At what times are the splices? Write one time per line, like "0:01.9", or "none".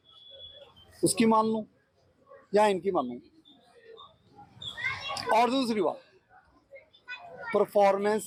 none

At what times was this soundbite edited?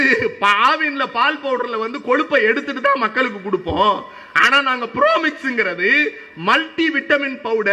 none

